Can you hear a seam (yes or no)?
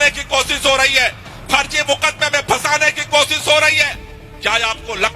no